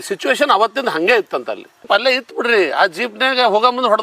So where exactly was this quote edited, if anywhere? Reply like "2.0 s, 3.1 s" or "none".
1.8 s